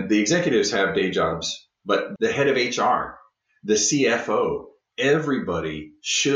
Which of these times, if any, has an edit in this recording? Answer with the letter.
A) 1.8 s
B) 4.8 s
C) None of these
A